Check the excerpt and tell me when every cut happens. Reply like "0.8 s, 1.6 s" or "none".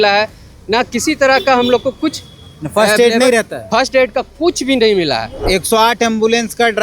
5.3 s